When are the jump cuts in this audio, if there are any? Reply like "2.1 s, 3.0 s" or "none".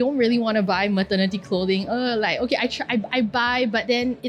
none